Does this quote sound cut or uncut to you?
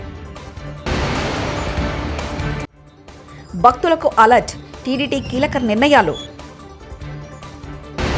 cut